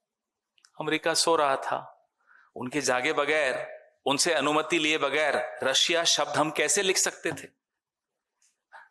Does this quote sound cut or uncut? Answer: uncut